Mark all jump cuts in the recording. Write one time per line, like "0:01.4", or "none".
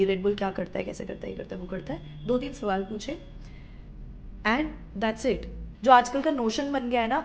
0:05.7